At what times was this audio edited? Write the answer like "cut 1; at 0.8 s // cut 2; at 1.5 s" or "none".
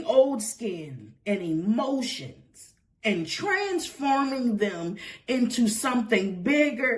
none